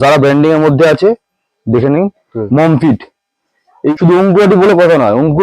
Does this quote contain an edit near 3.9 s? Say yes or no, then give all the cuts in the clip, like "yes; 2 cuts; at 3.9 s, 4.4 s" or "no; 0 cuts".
yes; 1 cut; at 3.9 s